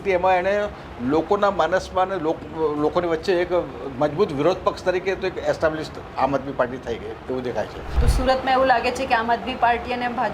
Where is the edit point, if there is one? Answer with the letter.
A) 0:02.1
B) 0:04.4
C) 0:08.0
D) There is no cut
C